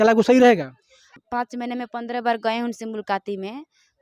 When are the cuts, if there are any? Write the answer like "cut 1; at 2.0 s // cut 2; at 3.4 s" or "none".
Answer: cut 1; at 1.1 s